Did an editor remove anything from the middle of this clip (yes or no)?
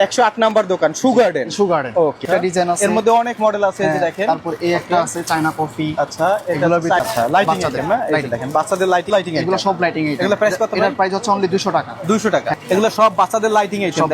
yes